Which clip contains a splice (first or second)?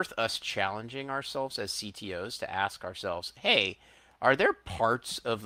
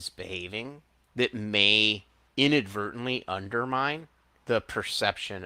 second